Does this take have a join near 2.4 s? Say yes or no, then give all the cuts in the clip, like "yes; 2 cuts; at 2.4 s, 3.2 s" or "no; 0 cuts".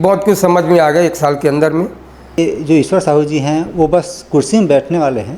yes; 1 cut; at 2.4 s